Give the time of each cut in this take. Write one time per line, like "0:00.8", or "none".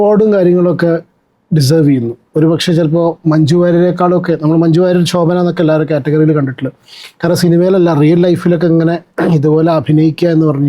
none